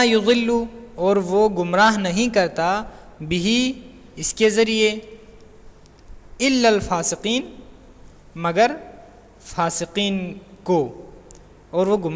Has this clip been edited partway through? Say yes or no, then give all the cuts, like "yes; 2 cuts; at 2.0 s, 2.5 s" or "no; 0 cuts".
no; 0 cuts